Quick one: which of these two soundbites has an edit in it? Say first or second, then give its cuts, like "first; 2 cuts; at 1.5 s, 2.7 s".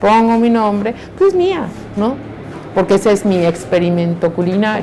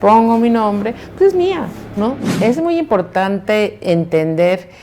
second; 1 cut; at 2.4 s